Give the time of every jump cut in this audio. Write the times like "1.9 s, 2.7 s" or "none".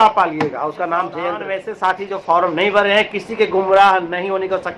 1.5 s